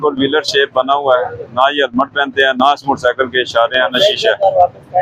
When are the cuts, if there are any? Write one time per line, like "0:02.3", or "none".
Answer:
none